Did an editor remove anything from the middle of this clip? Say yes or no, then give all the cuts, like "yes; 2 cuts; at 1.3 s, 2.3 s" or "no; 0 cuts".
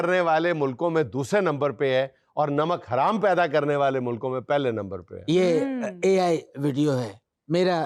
no; 0 cuts